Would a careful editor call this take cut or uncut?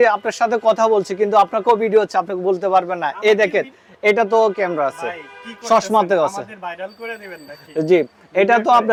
uncut